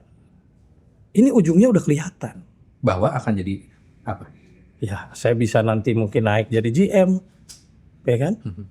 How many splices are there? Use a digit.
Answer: 0